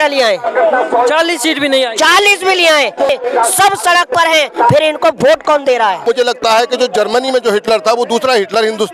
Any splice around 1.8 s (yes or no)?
no